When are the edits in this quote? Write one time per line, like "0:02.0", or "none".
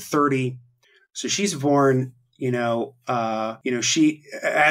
0:03.6